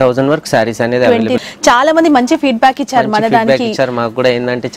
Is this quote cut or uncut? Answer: cut